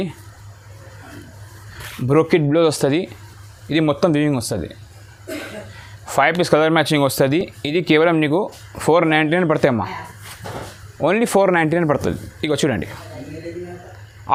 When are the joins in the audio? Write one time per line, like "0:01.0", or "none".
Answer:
none

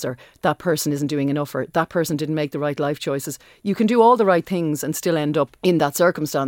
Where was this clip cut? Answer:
0:05.5

